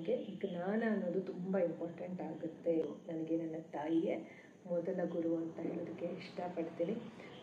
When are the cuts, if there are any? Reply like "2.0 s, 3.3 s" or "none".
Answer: 2.8 s